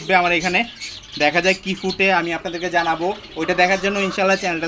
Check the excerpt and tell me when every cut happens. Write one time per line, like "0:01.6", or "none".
none